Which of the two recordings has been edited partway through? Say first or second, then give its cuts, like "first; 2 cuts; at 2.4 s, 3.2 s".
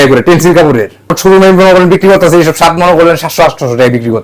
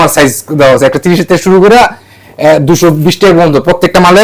first; 1 cut; at 1.2 s